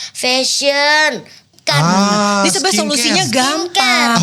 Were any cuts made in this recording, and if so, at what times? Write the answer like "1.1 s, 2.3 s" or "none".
1.4 s

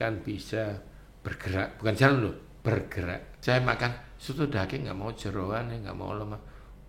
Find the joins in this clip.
3.2 s

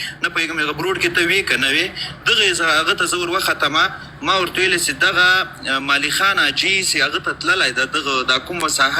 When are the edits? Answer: none

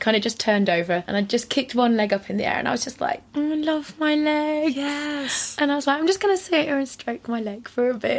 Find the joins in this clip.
1.1 s, 3.2 s

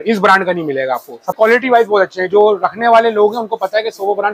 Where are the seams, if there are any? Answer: 1.4 s

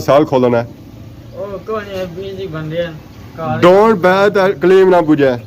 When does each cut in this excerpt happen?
none

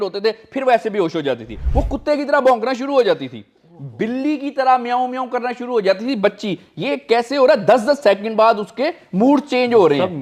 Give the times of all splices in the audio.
1.6 s

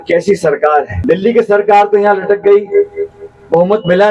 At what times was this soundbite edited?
1.0 s

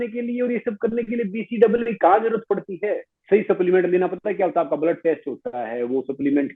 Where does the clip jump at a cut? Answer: 3.1 s

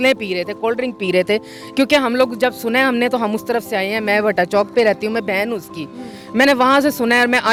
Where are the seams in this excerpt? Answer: none

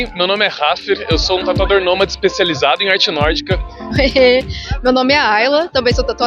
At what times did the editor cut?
3.9 s

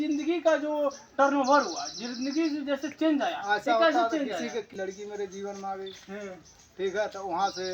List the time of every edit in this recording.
4.8 s

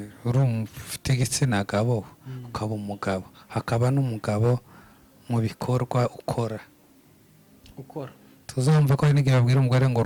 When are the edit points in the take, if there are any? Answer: none

